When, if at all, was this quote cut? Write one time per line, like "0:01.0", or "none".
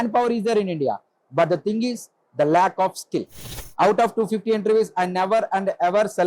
0:03.6